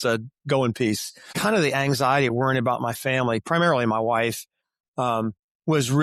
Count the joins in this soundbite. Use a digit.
1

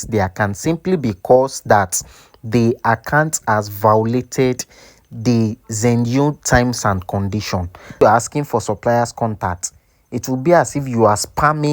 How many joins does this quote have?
1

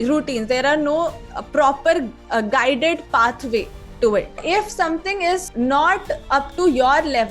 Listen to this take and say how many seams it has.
2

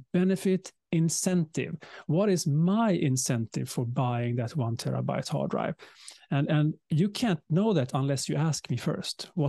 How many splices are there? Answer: 0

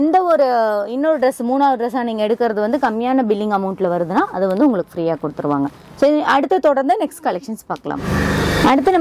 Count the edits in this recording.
0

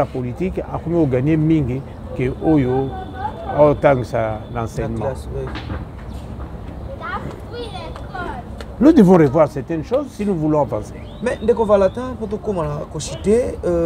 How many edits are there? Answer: 0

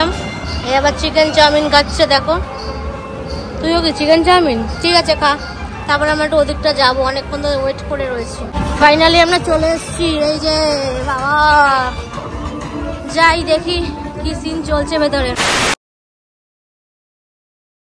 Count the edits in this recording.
0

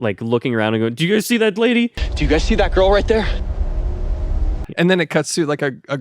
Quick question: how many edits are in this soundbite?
1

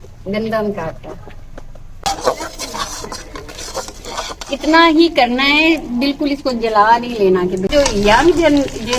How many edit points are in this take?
2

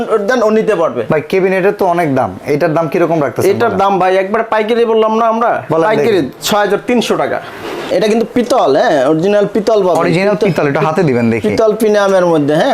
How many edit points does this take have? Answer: 2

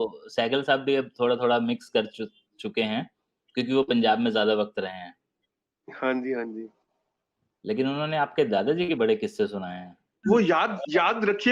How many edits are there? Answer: 1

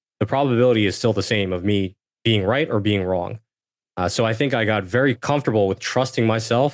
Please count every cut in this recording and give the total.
2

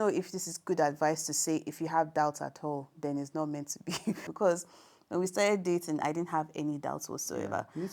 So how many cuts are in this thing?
1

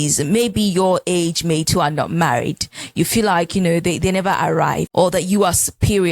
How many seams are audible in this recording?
1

